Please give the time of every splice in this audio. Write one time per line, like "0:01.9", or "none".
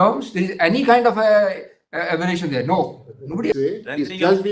0:03.5